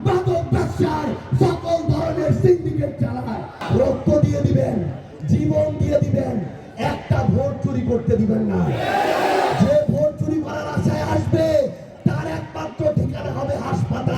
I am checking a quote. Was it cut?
yes; 1 cut; at 3.5 s

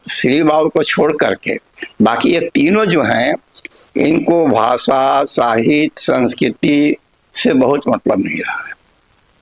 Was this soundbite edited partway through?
no; 0 cuts

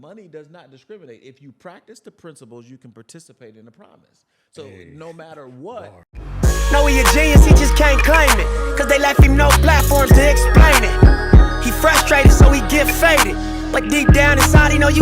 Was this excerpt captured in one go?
no; 1 cut; at 6.3 s

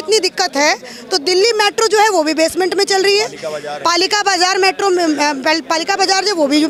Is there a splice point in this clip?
no; 0 cuts

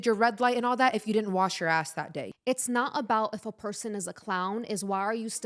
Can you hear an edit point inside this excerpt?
yes; 1 cut; at 2.2 s

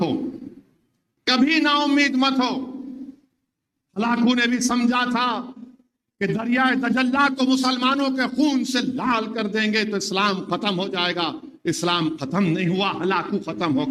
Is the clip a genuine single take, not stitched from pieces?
yes; 0 cuts

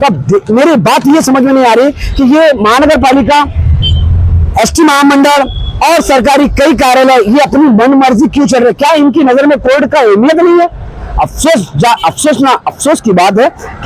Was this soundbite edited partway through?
no; 0 cuts

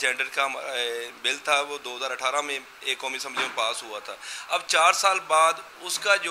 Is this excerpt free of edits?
yes; 0 cuts

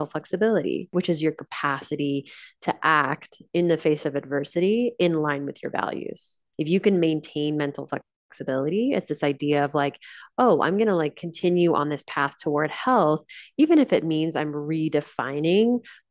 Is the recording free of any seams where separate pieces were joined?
no; 2 cuts; at 0.9 s, 6.4 s

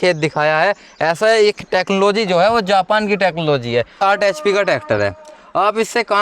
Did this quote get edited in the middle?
yes; 1 cut; at 3.9 s

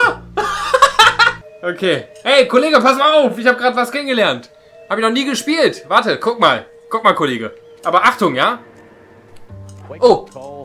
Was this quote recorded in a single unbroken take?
no; 1 cut; at 1.4 s

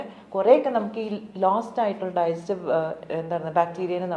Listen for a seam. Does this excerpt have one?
no; 0 cuts

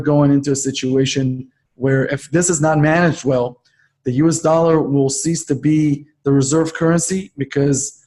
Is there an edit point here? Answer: no; 0 cuts

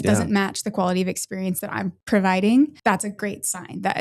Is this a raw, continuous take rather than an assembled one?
no; 2 cuts; at 2.0 s, 2.8 s

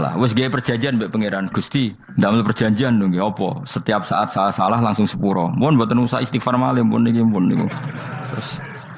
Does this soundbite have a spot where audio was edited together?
yes; 1 cut; at 2.0 s

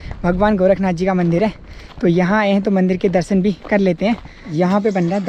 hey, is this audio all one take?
no; 1 cut; at 4.4 s

